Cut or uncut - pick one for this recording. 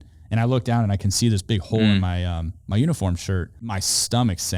cut